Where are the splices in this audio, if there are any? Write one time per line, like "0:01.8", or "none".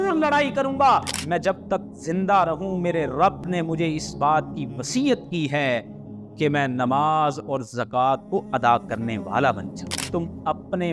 0:01.1
0:10.0